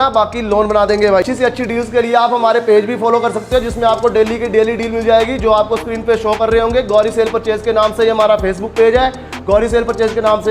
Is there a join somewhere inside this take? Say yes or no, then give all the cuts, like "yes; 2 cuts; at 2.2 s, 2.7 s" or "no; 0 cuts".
yes; 1 cut; at 1.2 s